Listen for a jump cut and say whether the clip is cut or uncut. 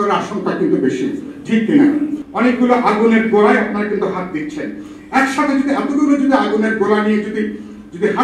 cut